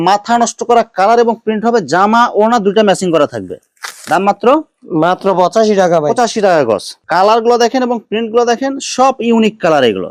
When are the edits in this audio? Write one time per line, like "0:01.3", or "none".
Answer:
none